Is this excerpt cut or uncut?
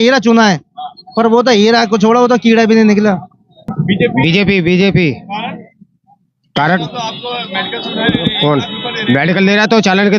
cut